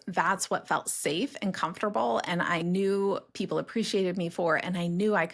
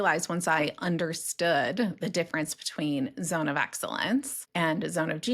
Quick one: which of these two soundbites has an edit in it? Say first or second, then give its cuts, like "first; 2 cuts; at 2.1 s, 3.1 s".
second; 1 cut; at 4.4 s